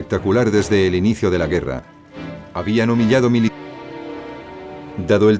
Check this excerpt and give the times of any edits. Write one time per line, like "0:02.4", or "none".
none